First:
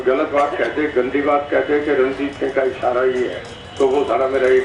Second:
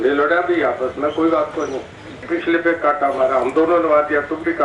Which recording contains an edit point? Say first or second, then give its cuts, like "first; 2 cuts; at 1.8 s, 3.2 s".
second; 1 cut; at 2.2 s